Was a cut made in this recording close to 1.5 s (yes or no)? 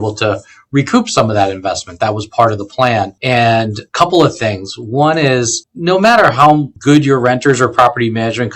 no